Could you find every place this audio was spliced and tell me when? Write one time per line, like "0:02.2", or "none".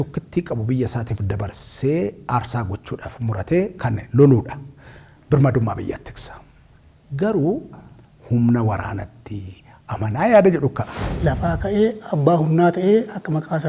0:07.7
0:11.1